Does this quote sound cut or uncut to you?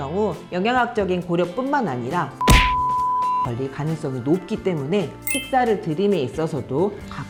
uncut